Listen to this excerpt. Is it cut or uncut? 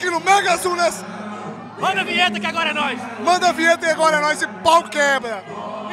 uncut